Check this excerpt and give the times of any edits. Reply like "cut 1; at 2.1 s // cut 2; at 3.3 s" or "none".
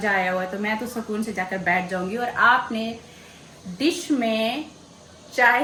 none